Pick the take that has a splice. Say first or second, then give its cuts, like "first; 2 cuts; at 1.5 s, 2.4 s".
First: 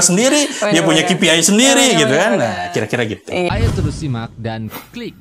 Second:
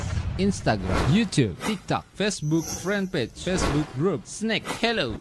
first; 1 cut; at 3.5 s